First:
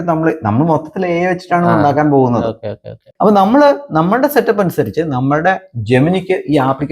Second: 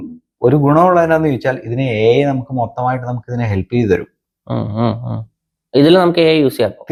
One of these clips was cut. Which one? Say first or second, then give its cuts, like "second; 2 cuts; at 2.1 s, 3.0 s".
first; 1 cut; at 3.1 s